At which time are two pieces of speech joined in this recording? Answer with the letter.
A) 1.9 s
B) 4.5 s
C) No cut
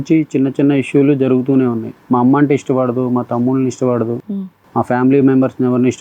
A